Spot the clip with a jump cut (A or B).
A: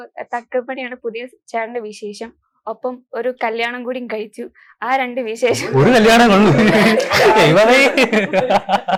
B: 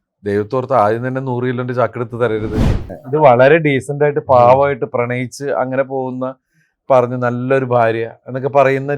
B